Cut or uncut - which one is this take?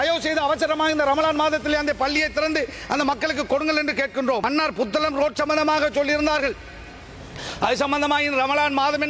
cut